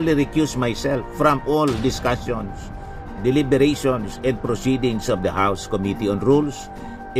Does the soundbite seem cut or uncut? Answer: uncut